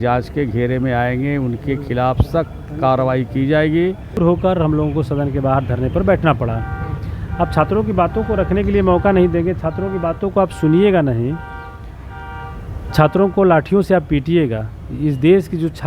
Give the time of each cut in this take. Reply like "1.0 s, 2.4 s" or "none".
4.2 s